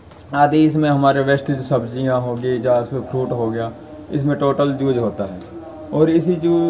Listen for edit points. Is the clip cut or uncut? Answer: uncut